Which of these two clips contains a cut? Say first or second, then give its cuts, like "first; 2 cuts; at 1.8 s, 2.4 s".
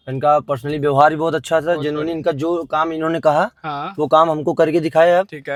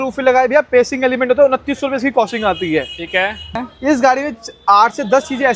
second; 1 cut; at 3.6 s